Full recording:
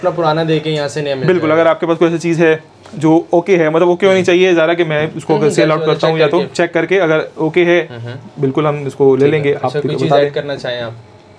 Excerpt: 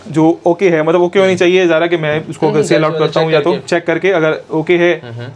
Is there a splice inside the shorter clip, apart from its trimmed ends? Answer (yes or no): no